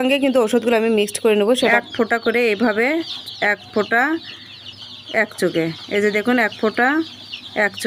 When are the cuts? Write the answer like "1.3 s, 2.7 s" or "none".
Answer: 1.6 s

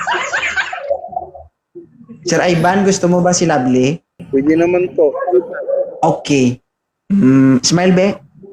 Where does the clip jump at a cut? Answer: 4.1 s

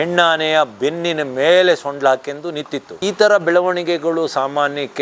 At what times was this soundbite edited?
none

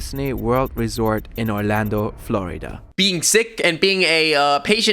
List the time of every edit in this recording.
2.8 s

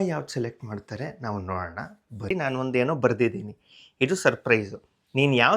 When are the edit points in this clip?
2.3 s

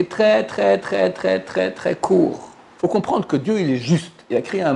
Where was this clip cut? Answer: 2.6 s

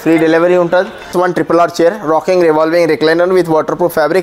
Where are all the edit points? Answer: 1.1 s

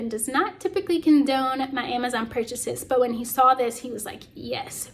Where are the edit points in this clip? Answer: none

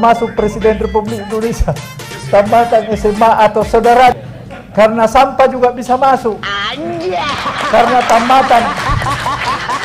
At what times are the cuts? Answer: 4.1 s

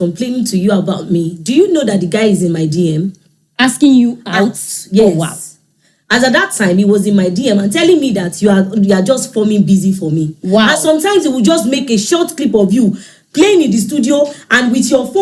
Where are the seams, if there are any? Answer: none

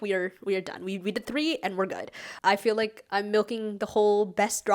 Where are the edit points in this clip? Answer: 2.3 s

